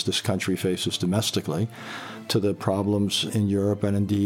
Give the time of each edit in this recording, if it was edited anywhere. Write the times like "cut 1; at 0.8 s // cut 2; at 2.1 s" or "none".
cut 1; at 3.3 s